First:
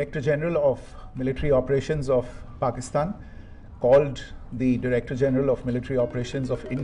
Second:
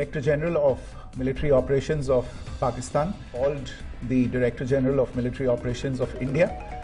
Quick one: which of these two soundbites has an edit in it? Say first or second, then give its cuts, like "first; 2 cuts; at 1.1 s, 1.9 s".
second; 1 cut; at 3.2 s